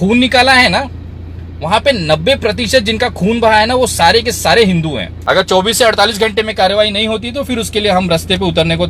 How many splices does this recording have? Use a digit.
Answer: 1